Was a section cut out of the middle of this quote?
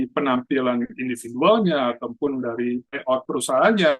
yes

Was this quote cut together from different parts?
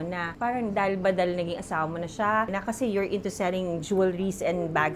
yes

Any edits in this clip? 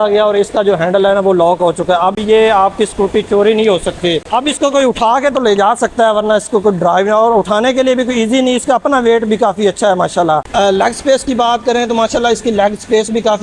no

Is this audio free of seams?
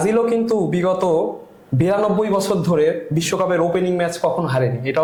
yes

